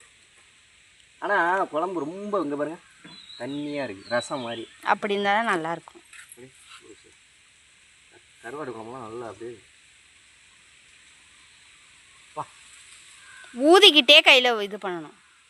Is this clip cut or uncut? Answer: uncut